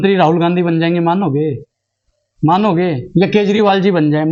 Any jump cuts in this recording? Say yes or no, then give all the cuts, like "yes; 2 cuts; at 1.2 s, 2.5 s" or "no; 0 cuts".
no; 0 cuts